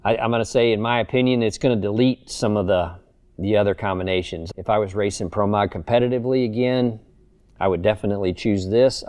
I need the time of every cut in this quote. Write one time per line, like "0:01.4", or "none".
0:01.6
0:04.4